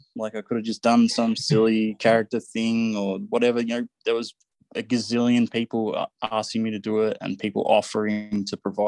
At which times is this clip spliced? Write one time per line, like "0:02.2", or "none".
none